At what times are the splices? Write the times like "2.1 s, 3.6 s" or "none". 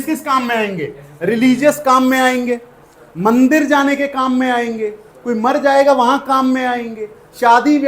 none